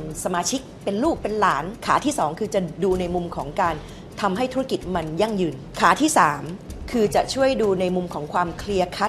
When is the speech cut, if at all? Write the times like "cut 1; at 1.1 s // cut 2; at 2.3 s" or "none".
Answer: cut 1; at 1.7 s // cut 2; at 5.6 s

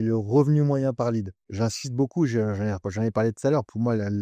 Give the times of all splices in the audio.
cut 1; at 1.4 s

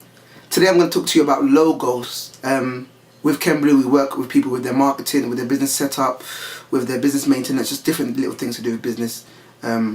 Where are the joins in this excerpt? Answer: cut 1; at 7.2 s

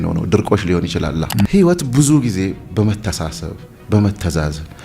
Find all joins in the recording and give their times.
cut 1; at 1.5 s

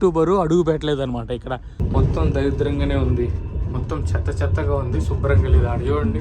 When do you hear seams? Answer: cut 1; at 1.8 s

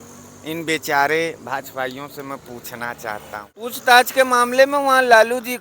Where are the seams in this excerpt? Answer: cut 1; at 3.5 s

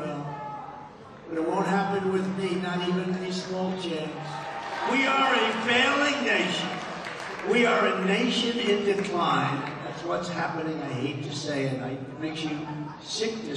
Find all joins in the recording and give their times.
cut 1; at 4.5 s

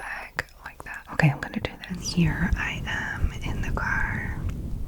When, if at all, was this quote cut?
cut 1; at 1.0 s // cut 2; at 2.1 s

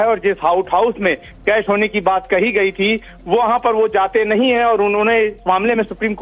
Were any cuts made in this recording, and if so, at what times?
cut 1; at 1.8 s

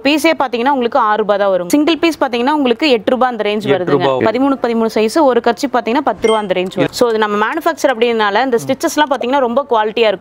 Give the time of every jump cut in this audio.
cut 1; at 1.7 s // cut 2; at 4.2 s // cut 3; at 6.9 s

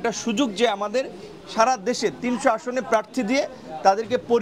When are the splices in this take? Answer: none

